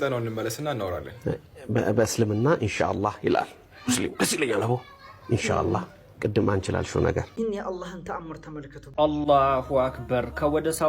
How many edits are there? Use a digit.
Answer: 2